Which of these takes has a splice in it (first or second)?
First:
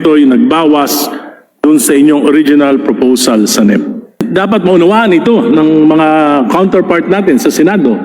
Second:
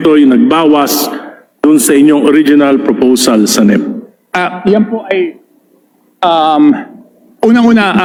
first